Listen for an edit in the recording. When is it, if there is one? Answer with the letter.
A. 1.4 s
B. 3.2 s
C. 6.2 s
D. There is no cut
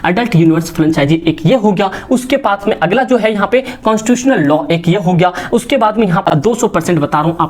C